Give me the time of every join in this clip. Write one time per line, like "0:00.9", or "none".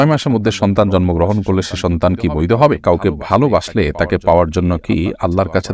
0:02.8